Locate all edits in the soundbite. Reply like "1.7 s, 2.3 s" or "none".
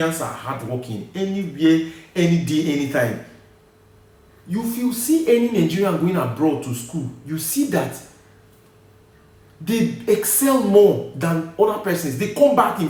none